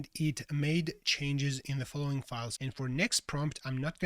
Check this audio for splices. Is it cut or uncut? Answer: cut